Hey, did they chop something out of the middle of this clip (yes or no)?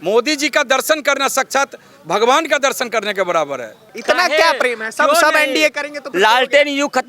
yes